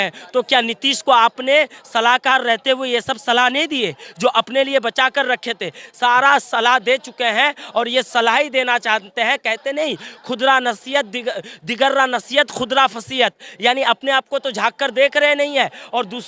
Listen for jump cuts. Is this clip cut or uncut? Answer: uncut